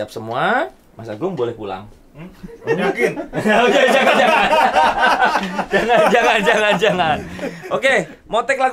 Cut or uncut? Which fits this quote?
uncut